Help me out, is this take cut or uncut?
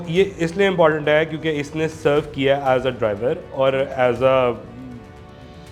uncut